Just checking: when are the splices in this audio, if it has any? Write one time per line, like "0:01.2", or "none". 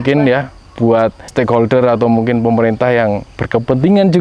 0:01.2

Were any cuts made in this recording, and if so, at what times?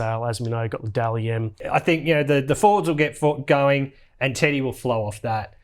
0:01.6

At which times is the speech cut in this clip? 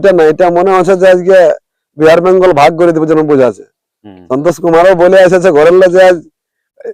none

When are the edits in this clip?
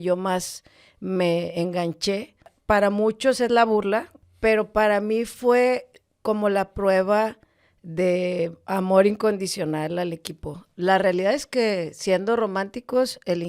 0:02.5
0:04.2
0:10.7

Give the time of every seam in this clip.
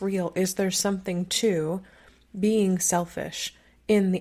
none

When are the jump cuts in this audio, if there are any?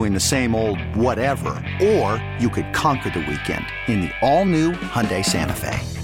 none

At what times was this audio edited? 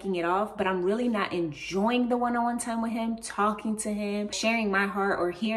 0:04.4

